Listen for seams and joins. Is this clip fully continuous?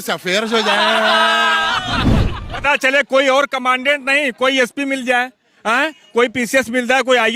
yes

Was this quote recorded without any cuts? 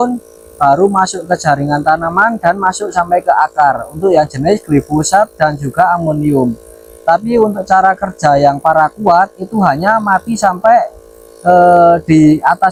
yes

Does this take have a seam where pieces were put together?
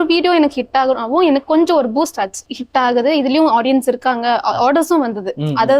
no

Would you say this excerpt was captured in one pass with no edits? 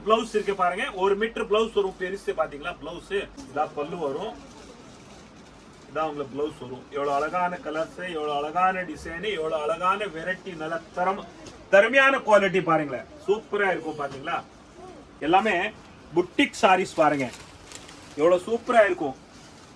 no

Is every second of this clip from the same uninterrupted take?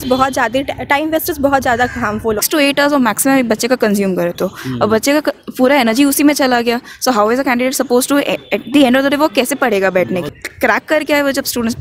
no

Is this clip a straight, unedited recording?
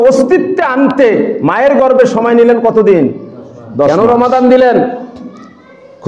no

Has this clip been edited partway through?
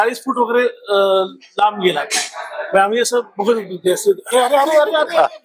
no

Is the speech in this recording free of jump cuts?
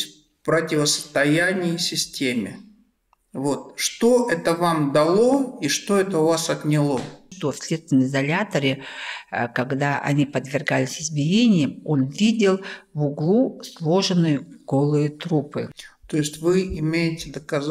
no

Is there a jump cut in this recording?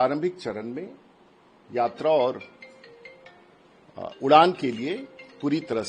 no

